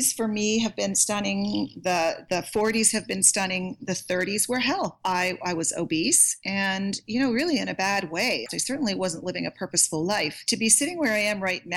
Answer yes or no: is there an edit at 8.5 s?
yes